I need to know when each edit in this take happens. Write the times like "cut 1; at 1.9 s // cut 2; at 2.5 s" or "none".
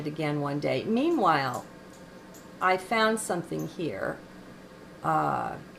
cut 1; at 4.5 s